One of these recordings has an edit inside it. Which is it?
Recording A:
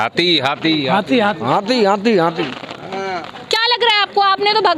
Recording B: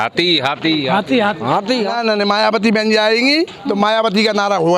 B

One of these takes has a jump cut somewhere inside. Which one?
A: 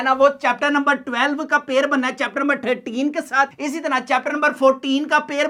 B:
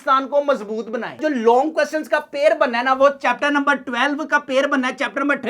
B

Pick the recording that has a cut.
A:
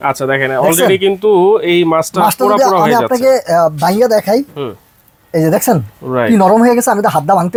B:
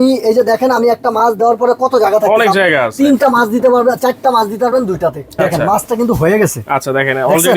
B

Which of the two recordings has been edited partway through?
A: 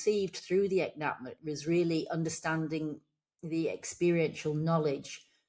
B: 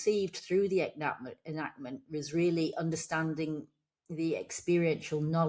A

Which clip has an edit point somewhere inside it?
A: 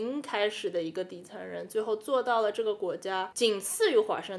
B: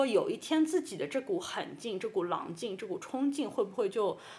A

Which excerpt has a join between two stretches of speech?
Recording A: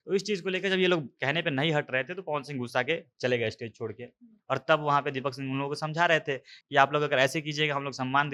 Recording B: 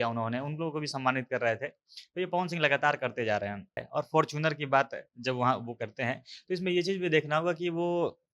B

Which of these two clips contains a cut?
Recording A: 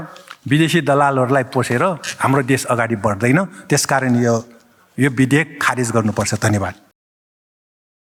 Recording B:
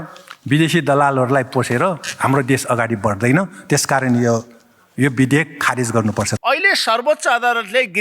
B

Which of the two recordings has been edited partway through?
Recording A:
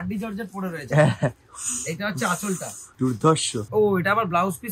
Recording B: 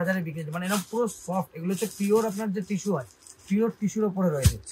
A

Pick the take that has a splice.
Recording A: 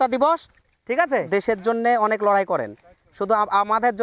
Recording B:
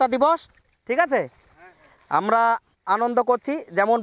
A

